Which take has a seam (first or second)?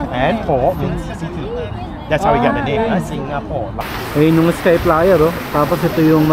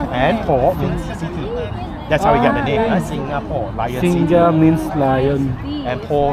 first